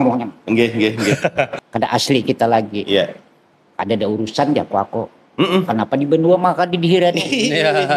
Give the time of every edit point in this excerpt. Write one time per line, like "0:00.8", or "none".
0:01.6